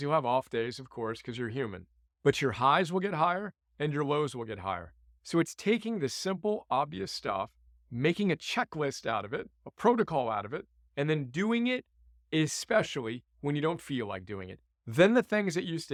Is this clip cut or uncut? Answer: uncut